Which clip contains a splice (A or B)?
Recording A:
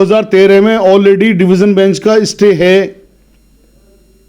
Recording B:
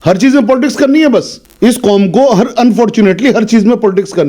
B